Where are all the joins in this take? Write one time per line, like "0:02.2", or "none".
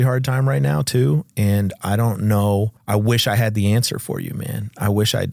0:02.8